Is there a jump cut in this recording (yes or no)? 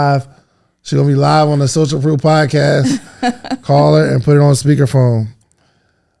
no